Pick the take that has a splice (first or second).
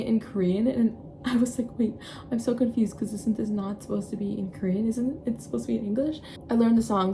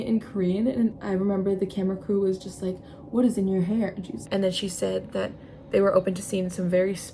second